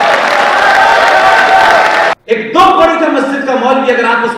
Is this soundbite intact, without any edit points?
no; 1 cut; at 2.1 s

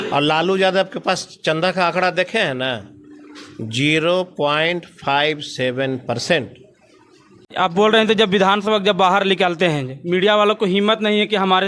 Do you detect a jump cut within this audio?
yes; 1 cut; at 7.5 s

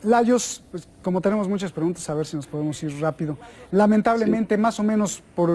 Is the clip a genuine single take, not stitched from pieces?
no; 1 cut; at 2.2 s

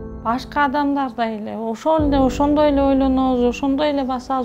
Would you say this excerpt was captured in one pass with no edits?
yes; 0 cuts

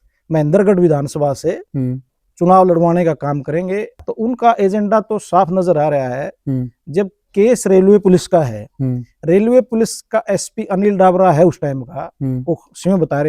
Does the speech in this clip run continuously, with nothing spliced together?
no; 1 cut; at 3.9 s

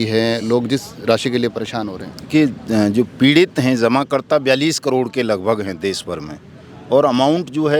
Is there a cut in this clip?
no; 0 cuts

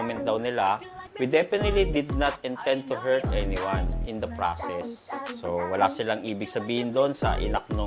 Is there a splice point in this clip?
no; 0 cuts

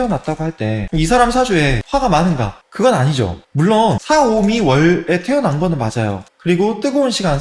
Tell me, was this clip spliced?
no; 0 cuts

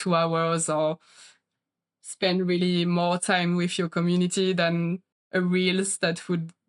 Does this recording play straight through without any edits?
no; 1 cut; at 5.2 s

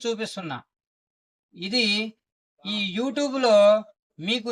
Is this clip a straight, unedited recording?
yes; 0 cuts

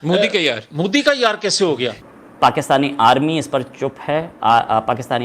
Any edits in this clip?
yes; 1 cut; at 2.0 s

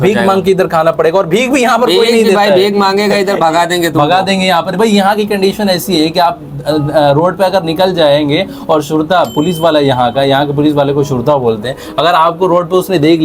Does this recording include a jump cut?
no; 0 cuts

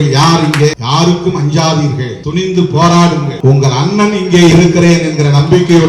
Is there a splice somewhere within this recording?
yes; 3 cuts; at 0.8 s, 2.1 s, 3.3 s

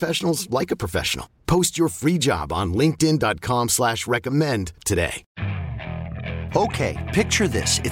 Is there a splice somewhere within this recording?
yes; 1 cut; at 5.2 s

